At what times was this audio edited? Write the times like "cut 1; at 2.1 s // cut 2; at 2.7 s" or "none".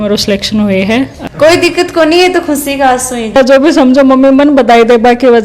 cut 1; at 1.3 s // cut 2; at 3.4 s